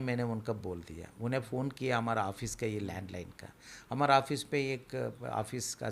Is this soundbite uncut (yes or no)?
yes